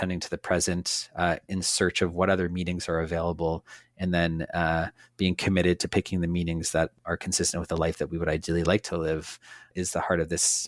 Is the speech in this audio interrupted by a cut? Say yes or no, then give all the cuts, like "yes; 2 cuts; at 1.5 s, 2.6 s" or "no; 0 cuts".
yes; 2 cuts; at 6.9 s, 9.7 s